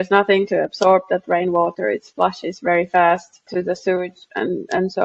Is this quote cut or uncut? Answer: cut